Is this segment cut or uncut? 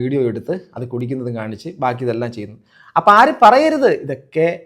uncut